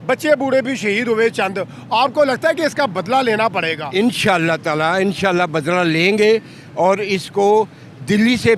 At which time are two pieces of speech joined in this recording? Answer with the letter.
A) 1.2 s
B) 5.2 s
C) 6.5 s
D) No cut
D